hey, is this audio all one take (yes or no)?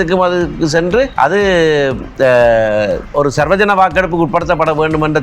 no